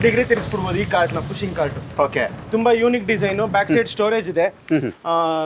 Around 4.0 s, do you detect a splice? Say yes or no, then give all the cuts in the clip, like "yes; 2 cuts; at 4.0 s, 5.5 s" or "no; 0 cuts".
no; 0 cuts